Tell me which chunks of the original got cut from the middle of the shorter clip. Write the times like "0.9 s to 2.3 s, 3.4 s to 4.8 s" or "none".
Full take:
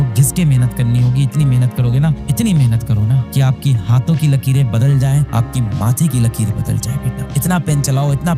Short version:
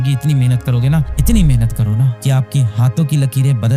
none

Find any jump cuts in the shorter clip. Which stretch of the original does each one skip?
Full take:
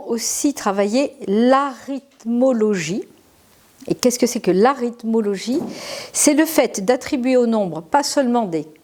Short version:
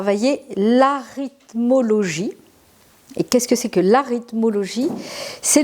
none

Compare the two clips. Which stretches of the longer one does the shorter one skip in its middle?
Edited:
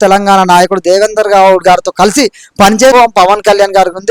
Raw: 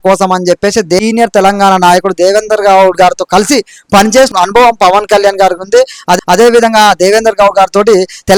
4.3 s to 4.6 s

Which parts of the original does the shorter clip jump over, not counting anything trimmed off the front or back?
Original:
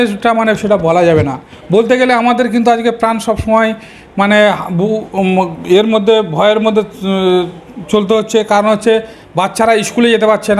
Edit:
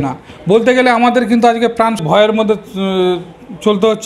3.2 s to 6.3 s

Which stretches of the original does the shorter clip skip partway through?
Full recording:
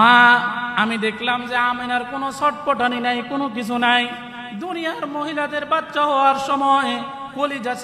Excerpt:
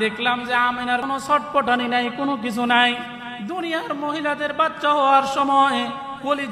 2.0 s to 2.1 s

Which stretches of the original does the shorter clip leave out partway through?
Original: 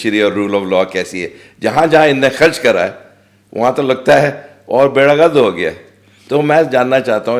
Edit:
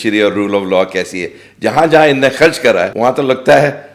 2.9 s to 3.5 s

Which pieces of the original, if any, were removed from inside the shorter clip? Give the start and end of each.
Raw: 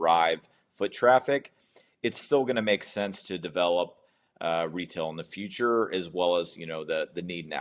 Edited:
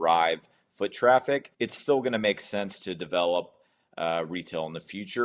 1.5 s to 1.9 s

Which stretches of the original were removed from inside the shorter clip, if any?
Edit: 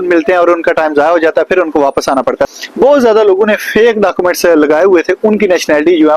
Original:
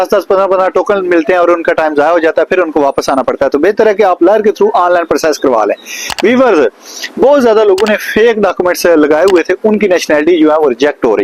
3.5 s to 6.9 s

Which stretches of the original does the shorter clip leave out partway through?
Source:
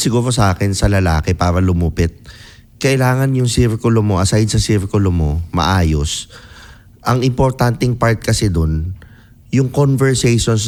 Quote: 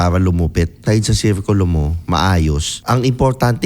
2.2 s to 4.3 s, 6.2 s to 6.9 s

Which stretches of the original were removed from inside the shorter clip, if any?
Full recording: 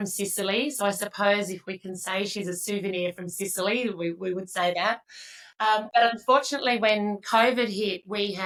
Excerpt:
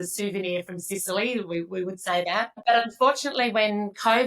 5.1 s to 5.9 s

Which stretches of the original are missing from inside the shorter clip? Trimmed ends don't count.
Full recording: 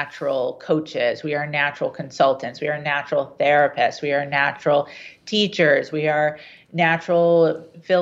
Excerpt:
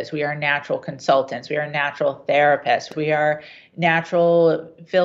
4.0 s to 5.9 s

